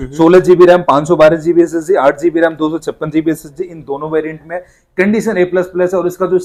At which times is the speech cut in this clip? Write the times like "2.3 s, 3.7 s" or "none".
none